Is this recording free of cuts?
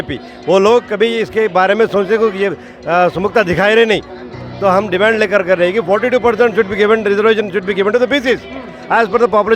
yes; 0 cuts

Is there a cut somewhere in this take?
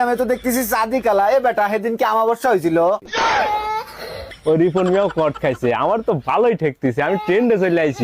yes; 1 cut; at 4.3 s

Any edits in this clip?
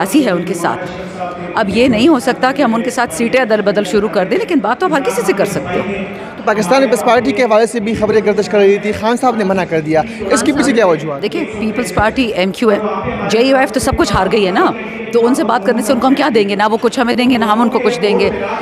no; 0 cuts

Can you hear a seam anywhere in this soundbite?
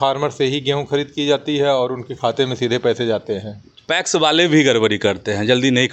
yes; 1 cut; at 3.8 s

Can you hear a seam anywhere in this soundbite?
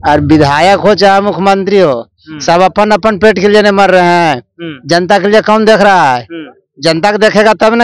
no; 0 cuts

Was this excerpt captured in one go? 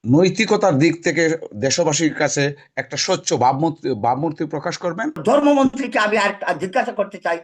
no; 1 cut; at 5.2 s

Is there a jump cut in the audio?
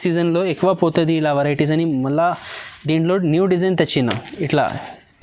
no; 0 cuts

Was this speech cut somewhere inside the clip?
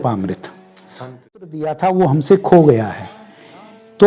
yes; 1 cut; at 1.4 s

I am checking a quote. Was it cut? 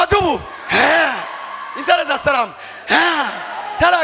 no; 0 cuts

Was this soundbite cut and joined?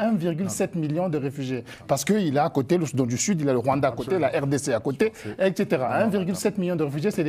no; 0 cuts

